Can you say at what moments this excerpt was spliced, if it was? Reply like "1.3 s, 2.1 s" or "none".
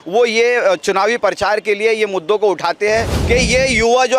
3.1 s